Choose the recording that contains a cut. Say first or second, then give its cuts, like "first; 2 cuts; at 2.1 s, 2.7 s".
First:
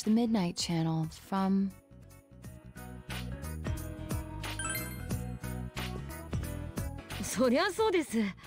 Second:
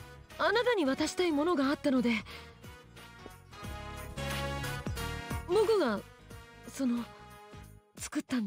first; 1 cut; at 1.9 s